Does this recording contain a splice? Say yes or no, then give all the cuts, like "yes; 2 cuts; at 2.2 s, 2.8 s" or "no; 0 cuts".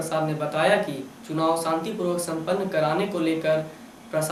no; 0 cuts